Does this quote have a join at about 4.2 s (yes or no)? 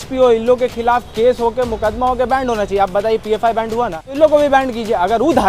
yes